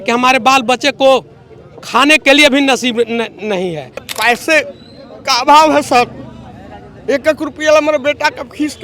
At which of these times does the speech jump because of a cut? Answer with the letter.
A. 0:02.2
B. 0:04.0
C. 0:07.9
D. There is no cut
B